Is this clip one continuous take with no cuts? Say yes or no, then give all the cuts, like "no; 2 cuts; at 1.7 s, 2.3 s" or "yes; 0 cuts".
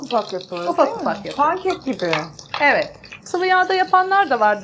no; 1 cut; at 3.1 s